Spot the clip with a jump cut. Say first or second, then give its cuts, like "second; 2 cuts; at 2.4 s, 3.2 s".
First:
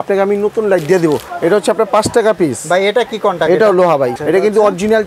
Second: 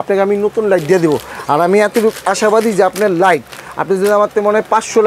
first; 2 cuts; at 1.3 s, 4.2 s